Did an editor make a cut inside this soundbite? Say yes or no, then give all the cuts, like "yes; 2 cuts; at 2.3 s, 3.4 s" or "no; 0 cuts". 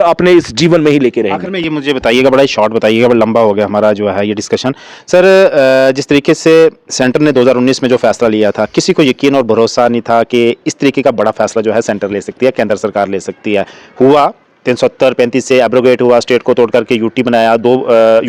no; 0 cuts